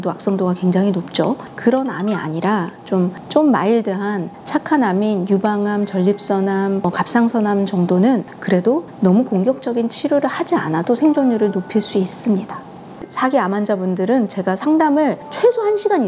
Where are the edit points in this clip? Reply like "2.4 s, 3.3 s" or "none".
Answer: 13.1 s

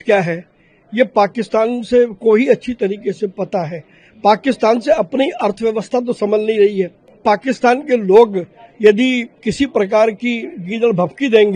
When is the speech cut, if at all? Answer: 7.1 s

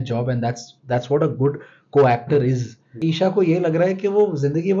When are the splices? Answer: 3.0 s

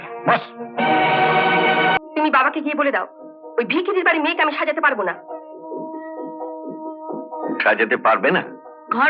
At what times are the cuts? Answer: 2.0 s

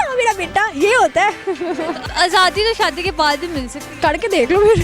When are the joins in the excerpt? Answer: 2.1 s, 3.8 s

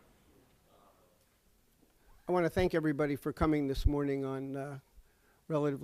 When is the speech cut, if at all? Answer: none

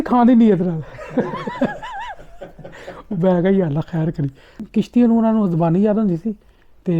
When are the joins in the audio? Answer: 4.6 s

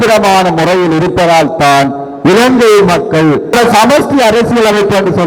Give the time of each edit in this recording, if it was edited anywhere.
3.5 s

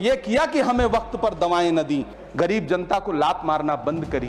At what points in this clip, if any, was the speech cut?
2.2 s

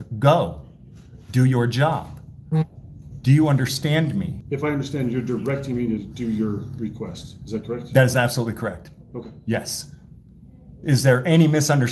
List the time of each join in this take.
4.4 s

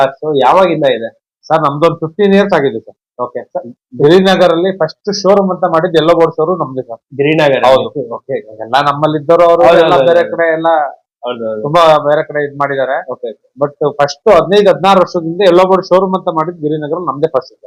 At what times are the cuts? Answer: none

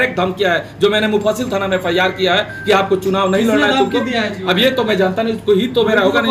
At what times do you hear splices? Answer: none

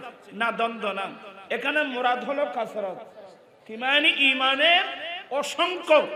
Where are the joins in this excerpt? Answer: none

